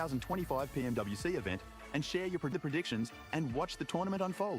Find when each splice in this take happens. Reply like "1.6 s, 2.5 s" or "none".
2.5 s

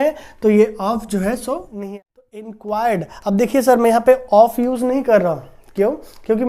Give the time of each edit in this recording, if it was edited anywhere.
1.8 s

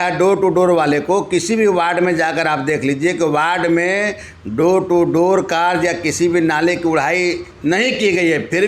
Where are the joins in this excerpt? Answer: none

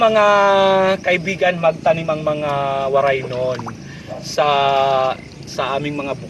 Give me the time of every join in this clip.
none

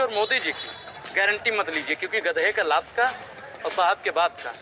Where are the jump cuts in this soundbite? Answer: none

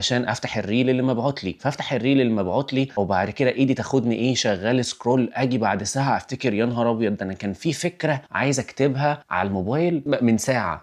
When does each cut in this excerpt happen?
none

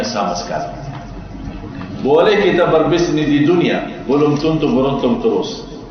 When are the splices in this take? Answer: none

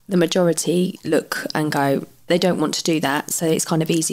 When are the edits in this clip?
2.3 s

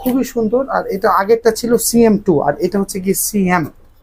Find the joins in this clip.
none

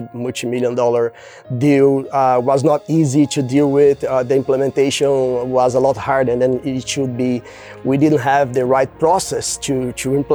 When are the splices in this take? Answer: none

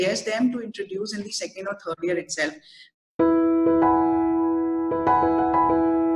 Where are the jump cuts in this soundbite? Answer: 2.9 s

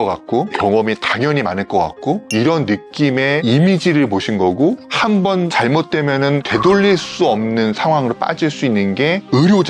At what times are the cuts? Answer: 2.2 s, 3.4 s, 5.1 s, 6.4 s

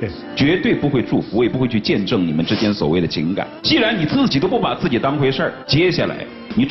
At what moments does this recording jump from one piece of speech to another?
3.5 s, 5.6 s

